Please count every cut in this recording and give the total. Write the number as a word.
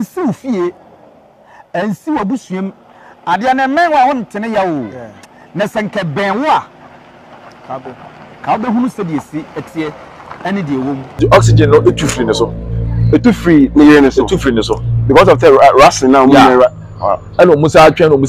one